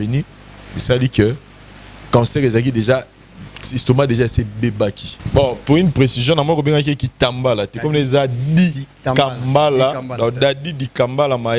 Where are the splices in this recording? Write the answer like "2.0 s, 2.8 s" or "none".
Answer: 5.1 s